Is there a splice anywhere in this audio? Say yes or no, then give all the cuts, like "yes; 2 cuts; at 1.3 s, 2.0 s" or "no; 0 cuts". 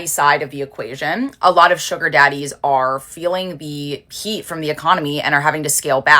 no; 0 cuts